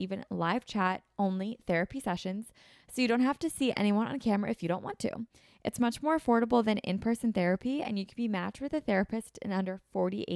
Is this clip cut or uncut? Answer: uncut